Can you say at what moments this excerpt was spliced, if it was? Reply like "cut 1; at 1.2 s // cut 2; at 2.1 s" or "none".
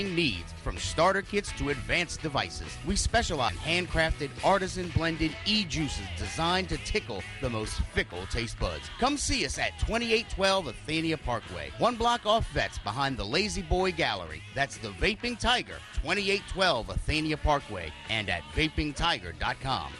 cut 1; at 3.3 s

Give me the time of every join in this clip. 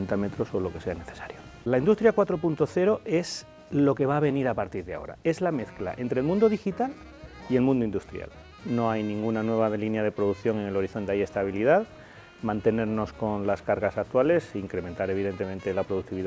cut 1; at 1.7 s // cut 2; at 8.5 s

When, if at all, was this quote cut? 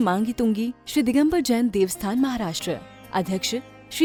none

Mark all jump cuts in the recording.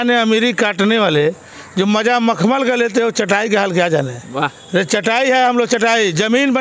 none

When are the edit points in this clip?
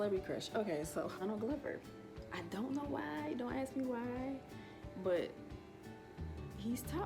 cut 1; at 1.2 s

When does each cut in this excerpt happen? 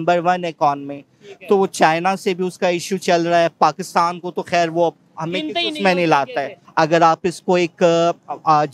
cut 1; at 6.6 s

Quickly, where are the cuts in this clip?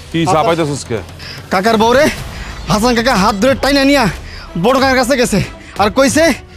cut 1; at 1.1 s

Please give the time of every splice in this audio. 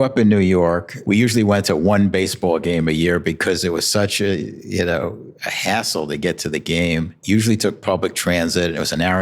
cut 1; at 0.9 s // cut 2; at 7.2 s

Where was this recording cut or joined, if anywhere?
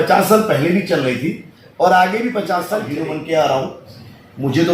cut 1; at 2.9 s

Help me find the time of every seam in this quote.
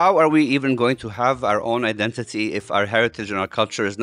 none

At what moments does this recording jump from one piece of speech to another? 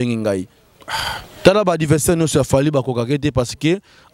none

